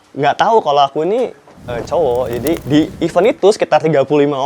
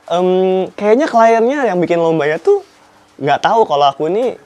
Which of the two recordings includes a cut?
first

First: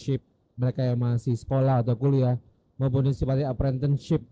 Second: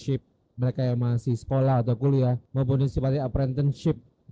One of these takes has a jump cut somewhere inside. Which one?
second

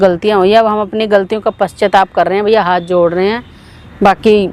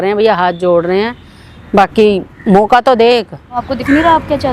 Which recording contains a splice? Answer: second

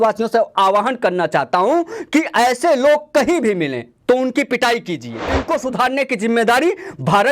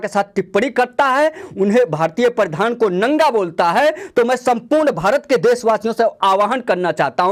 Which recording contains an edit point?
first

